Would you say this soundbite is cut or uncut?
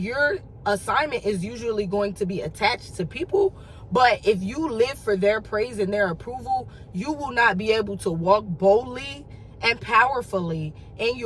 uncut